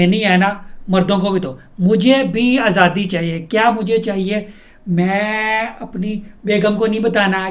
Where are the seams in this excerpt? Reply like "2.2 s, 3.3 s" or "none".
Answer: none